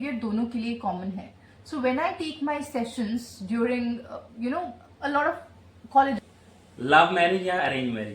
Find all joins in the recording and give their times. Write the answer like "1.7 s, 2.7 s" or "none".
6.2 s